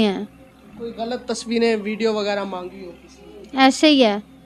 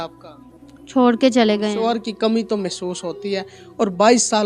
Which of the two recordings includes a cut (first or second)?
second